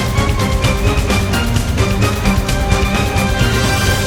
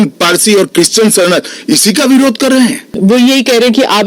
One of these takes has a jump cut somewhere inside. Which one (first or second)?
second